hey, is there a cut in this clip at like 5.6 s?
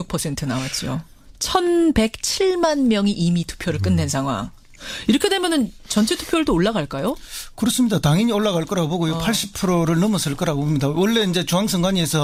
no; 0 cuts

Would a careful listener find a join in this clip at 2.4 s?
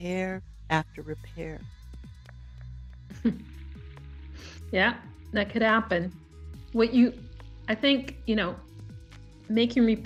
no; 0 cuts

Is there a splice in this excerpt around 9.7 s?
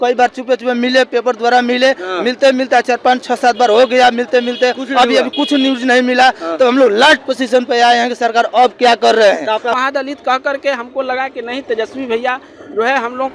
yes; 1 cut; at 9.7 s

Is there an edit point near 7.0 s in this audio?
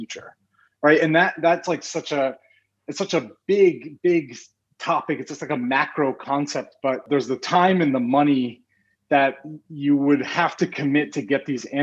yes; 1 cut; at 7.0 s

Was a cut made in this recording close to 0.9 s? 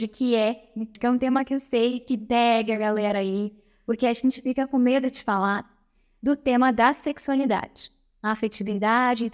yes; 1 cut; at 0.9 s

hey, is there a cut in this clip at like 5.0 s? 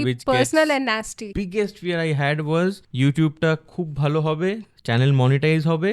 no; 2 cuts; at 1.2 s, 2.9 s

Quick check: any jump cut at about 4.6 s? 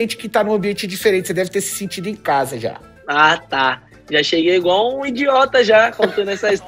no; 0 cuts

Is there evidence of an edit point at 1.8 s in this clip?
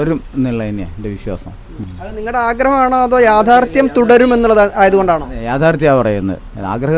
yes; 1 cut; at 1.8 s

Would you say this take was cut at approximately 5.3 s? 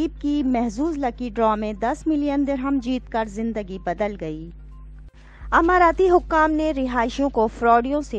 yes; 1 cut; at 5.3 s

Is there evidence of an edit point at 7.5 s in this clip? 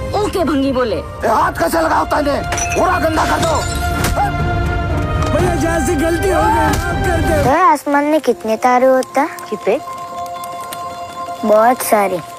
yes; 1 cut; at 7.5 s

